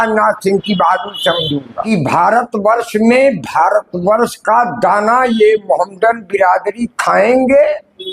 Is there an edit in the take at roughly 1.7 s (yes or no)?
yes